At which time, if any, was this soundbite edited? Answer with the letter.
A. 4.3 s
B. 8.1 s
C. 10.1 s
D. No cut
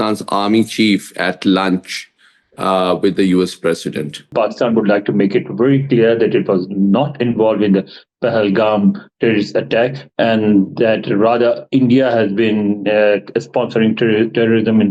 A